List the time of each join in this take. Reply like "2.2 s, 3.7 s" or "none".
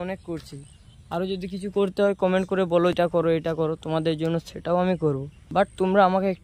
2.9 s, 5.3 s

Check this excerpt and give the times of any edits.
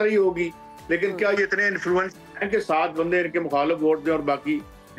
none

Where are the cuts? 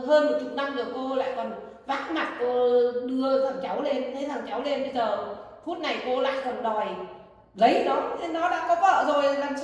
none

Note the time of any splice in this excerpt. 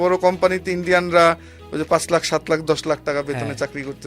none

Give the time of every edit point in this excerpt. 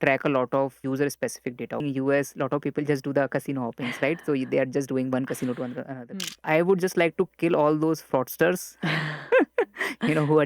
0.8 s, 1.8 s, 6.2 s

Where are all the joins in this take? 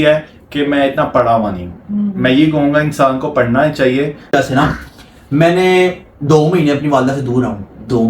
4.3 s

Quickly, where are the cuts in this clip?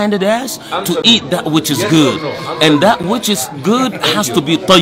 none

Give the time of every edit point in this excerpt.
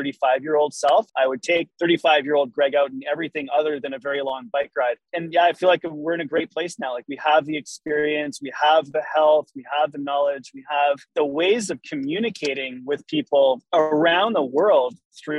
1.7 s

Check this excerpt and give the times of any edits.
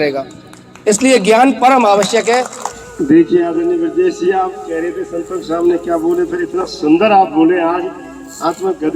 2.6 s

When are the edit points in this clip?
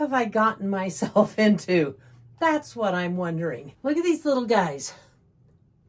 3.7 s

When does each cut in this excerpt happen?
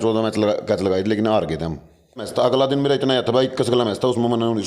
2.3 s

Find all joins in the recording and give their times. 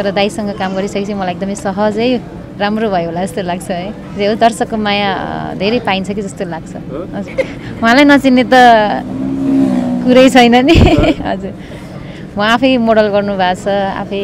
7.3 s

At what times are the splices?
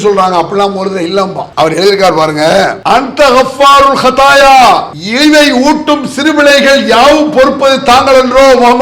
1.4 s, 2.8 s, 5.0 s

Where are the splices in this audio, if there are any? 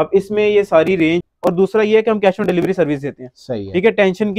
1.3 s

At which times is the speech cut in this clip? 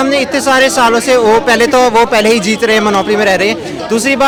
none

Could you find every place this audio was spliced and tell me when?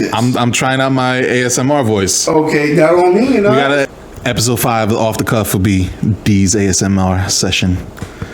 3.9 s

